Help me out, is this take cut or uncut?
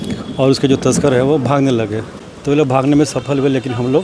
cut